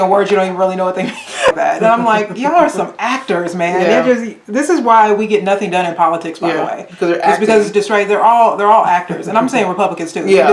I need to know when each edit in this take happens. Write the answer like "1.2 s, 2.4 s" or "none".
none